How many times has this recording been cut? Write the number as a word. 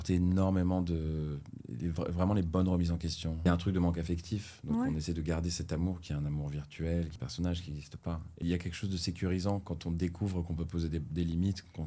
three